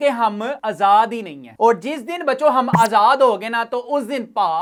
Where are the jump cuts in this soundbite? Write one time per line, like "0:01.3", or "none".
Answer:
none